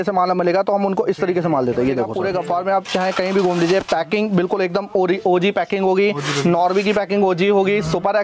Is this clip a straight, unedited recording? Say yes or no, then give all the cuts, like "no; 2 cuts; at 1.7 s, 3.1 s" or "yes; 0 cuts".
no; 1 cut; at 2.1 s